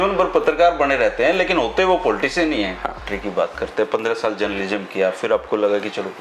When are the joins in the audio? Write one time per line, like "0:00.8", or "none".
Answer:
0:03.1